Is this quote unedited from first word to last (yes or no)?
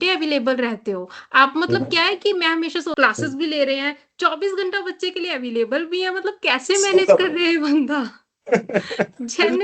no